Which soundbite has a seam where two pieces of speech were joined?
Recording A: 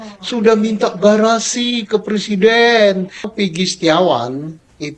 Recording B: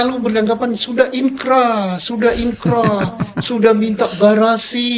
A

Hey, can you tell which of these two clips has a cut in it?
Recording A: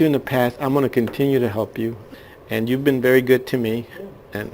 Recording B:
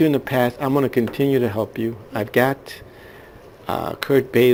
A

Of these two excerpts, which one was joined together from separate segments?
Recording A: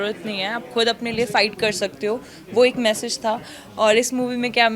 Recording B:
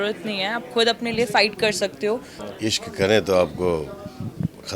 B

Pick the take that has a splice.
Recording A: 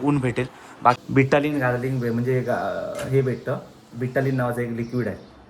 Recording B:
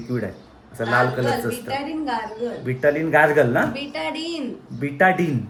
A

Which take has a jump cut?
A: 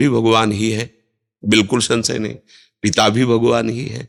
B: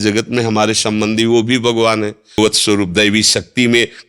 B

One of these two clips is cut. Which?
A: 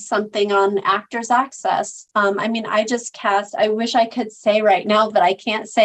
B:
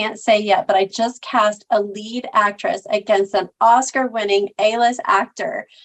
A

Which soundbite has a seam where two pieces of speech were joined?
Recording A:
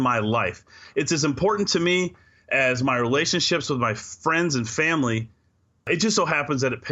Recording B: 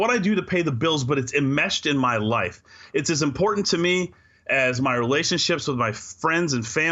A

